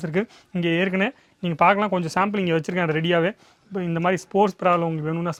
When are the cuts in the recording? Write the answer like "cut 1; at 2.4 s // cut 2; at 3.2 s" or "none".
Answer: none

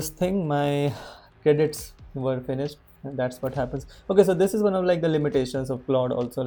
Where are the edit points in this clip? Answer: none

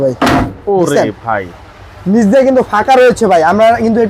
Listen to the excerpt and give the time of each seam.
none

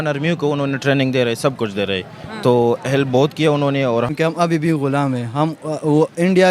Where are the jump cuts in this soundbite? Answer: cut 1; at 4.1 s

